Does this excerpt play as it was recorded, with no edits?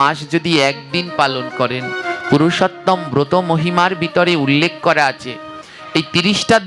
yes; 0 cuts

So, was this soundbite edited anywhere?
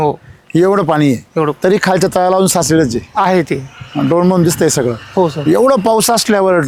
no; 0 cuts

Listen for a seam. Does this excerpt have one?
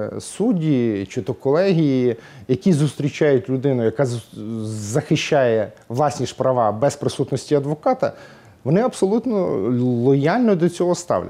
no; 0 cuts

